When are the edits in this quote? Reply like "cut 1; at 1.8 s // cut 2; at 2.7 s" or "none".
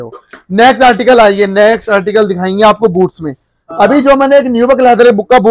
none